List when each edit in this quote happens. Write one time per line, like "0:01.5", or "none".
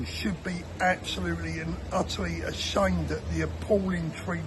none

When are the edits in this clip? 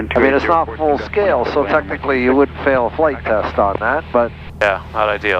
0:04.4

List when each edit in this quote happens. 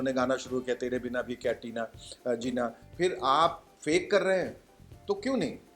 0:02.8

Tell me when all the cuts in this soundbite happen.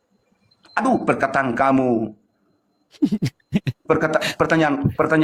none

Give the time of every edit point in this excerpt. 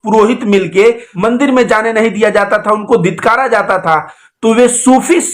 none

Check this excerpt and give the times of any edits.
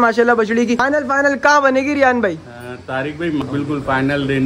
0:00.8
0:03.4

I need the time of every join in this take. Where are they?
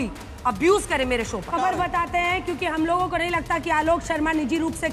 0:01.5

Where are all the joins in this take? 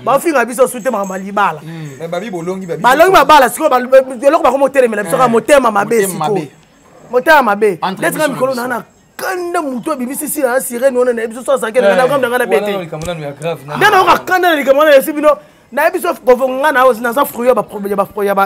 none

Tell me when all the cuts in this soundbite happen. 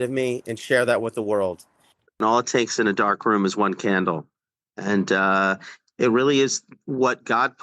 0:02.2

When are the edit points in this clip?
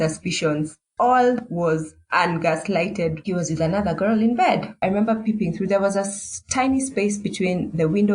0:03.2
0:04.7

